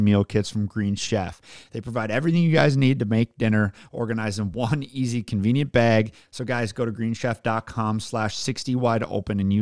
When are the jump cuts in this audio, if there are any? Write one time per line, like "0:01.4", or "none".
0:06.3